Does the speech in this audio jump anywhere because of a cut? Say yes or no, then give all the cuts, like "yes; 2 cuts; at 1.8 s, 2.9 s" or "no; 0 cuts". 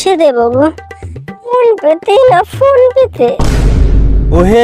no; 0 cuts